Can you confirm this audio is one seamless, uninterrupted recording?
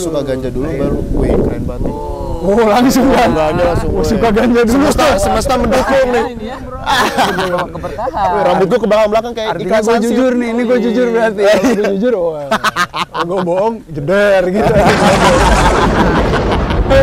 yes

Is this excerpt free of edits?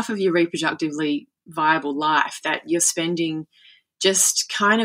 yes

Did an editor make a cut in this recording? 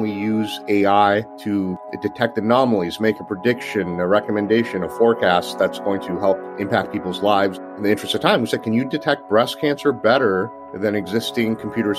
yes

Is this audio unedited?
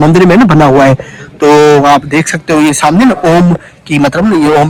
yes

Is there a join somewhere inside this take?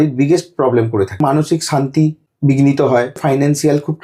yes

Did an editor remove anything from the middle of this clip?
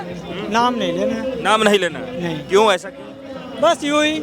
no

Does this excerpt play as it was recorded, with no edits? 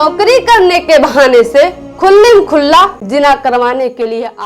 no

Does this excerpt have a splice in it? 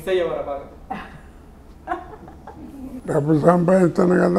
yes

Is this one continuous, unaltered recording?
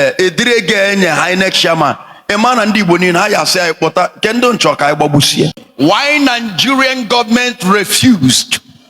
no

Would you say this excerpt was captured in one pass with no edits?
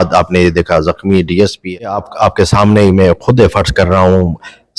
no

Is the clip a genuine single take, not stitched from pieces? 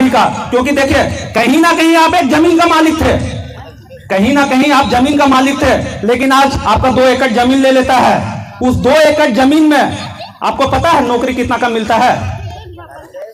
yes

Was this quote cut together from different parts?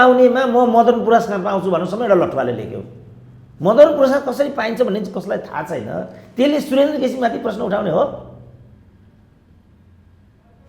no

